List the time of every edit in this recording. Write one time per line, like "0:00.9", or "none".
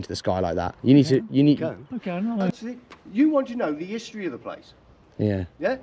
0:02.5